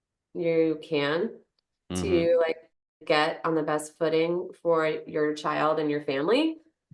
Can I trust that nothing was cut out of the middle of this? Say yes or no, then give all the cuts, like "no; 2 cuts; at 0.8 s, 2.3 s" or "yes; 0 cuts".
yes; 0 cuts